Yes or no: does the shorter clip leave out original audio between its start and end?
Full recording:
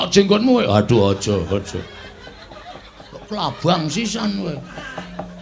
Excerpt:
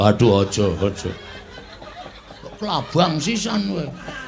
no